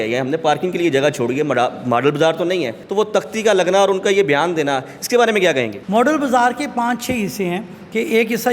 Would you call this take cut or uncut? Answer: cut